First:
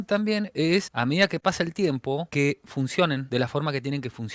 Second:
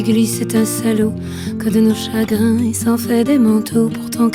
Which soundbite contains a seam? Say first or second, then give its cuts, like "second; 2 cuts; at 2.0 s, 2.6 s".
first; 3 cuts; at 0.9 s, 2.3 s, 3.2 s